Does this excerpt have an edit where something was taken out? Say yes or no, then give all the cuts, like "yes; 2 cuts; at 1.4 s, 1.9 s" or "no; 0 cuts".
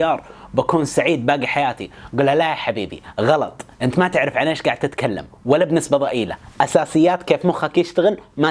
no; 0 cuts